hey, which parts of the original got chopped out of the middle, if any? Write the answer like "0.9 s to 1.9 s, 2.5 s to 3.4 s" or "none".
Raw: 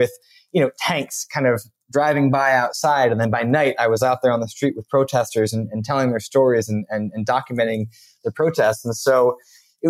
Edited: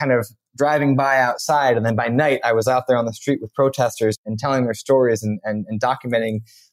5.6 s to 5.7 s